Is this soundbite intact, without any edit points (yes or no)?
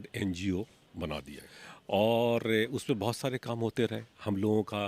yes